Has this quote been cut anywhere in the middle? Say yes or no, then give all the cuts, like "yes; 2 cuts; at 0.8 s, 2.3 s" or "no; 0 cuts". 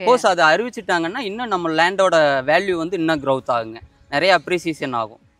no; 0 cuts